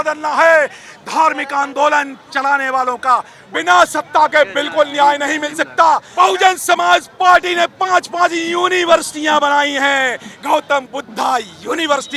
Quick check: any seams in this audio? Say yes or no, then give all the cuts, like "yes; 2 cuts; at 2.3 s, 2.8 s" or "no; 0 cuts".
yes; 2 cuts; at 3.4 s, 6.1 s